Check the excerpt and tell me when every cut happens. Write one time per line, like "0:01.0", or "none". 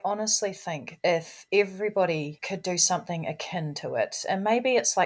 0:01.0
0:02.4